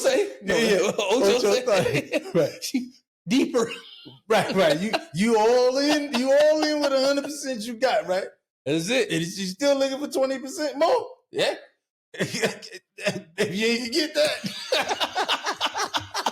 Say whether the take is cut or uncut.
uncut